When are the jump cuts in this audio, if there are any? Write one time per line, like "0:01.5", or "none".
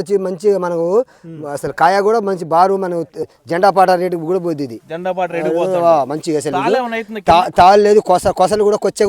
0:03.2